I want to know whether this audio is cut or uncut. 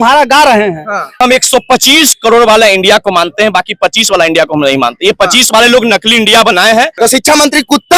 cut